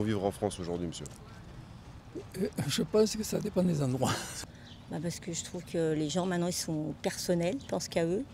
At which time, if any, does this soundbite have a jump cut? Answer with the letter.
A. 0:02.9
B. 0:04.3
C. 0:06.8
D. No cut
B